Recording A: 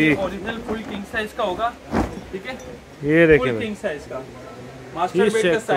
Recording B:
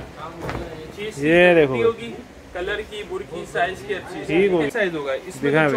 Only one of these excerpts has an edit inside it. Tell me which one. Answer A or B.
B